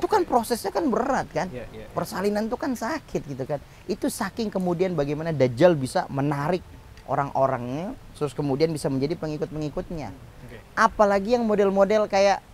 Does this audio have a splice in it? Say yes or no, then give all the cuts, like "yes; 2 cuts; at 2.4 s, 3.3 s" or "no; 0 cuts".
no; 0 cuts